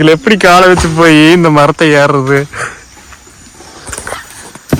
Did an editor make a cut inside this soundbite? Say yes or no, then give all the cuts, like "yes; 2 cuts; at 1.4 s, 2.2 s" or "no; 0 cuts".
no; 0 cuts